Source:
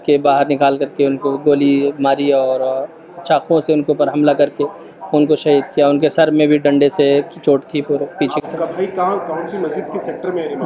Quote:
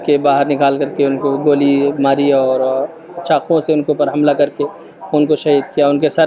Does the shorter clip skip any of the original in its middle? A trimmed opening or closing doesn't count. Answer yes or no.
no